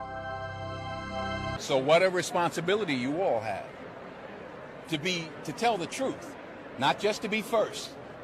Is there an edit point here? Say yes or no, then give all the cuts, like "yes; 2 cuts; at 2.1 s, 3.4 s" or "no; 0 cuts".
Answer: yes; 1 cut; at 1.5 s